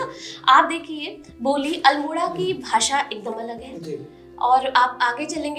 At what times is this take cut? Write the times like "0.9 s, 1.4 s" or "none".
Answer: none

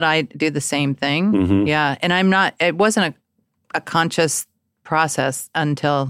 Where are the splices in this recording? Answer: none

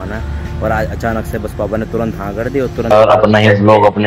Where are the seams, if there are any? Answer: 2.9 s

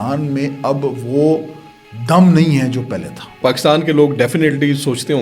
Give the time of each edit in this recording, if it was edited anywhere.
3.4 s

